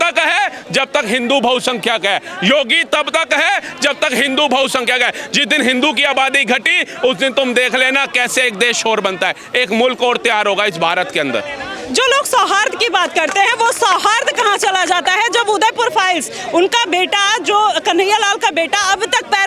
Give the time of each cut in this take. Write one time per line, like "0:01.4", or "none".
none